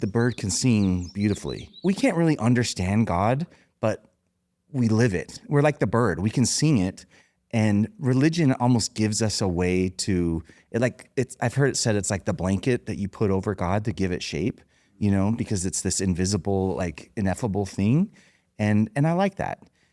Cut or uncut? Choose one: cut